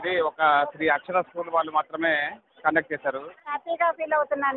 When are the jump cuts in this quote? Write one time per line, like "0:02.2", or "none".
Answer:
0:03.5